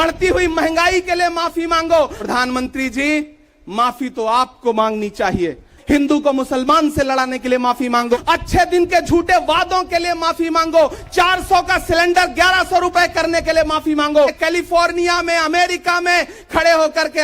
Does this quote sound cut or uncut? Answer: cut